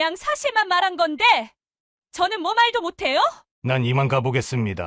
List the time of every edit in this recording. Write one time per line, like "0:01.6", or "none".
0:03.5